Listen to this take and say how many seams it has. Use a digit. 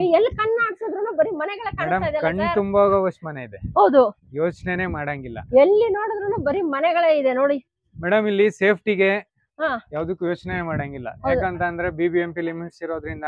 0